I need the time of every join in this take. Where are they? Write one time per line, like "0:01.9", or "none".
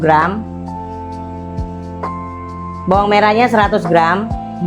0:01.0
0:02.8